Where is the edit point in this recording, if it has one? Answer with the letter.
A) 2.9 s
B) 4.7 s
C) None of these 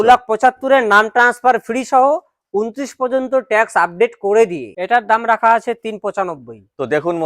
B